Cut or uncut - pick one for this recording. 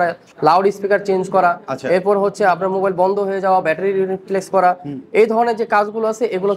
uncut